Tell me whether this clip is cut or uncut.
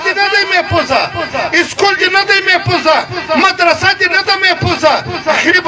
uncut